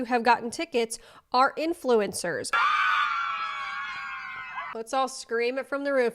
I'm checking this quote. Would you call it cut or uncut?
cut